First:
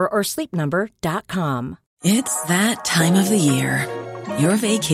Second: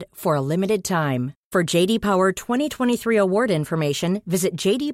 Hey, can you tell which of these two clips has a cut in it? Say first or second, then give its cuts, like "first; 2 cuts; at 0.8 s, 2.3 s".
first; 1 cut; at 1.8 s